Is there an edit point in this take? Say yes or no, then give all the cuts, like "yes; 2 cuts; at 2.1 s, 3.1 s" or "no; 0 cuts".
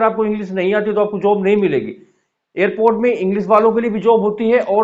no; 0 cuts